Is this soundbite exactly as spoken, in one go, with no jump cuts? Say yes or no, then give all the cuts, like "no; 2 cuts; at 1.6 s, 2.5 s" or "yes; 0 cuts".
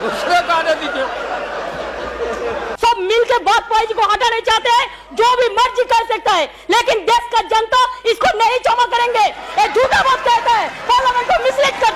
no; 1 cut; at 2.7 s